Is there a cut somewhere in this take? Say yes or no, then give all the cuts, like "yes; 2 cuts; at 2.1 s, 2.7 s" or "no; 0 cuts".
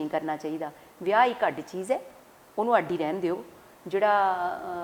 no; 0 cuts